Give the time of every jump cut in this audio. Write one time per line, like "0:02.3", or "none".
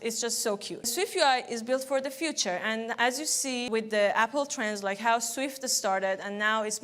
0:00.9
0:03.7

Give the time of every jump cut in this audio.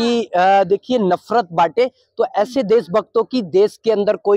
none

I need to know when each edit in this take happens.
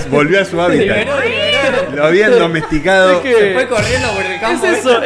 none

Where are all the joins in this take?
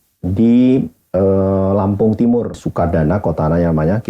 0:02.6

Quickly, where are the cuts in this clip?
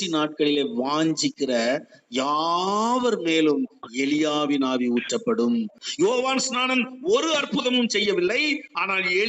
0:05.8

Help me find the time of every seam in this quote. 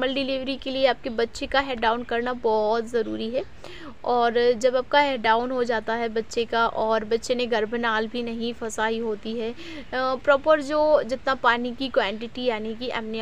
none

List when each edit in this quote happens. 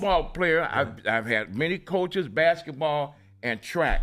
none

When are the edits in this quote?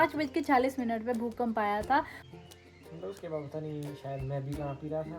0:02.2

